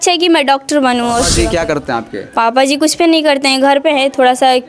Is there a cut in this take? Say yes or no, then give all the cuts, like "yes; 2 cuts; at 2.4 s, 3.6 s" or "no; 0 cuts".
yes; 1 cut; at 1.3 s